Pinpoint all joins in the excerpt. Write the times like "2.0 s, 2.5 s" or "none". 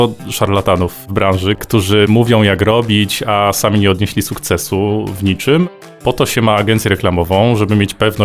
2.1 s, 5.8 s